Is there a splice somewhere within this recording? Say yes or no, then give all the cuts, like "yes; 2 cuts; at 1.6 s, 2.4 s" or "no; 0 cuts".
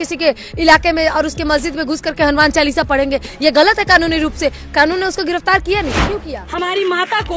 yes; 1 cut; at 6.1 s